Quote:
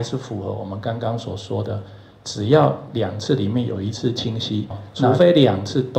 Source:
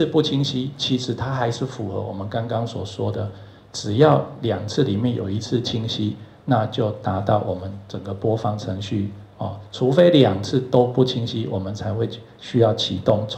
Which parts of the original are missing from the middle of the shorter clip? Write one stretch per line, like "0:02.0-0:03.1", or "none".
0:06.5-0:09.8